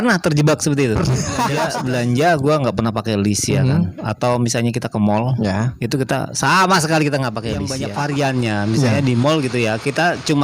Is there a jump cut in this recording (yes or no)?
yes